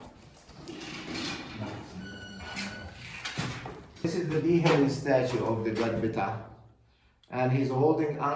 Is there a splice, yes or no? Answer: yes